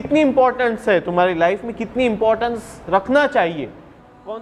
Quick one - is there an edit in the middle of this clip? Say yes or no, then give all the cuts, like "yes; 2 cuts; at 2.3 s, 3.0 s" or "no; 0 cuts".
no; 0 cuts